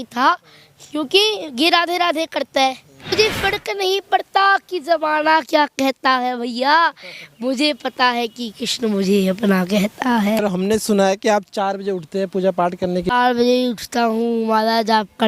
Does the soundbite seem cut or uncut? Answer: cut